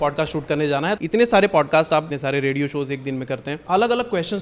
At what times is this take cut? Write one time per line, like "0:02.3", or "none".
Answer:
0:01.0
0:02.1
0:03.5